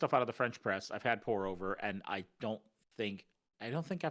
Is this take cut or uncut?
uncut